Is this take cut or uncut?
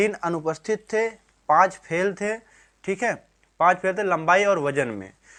uncut